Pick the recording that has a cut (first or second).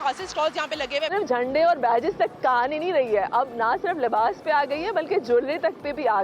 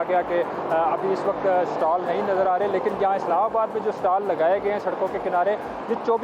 first